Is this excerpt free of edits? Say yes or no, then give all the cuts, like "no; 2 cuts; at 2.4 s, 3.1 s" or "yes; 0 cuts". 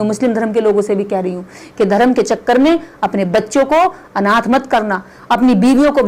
yes; 0 cuts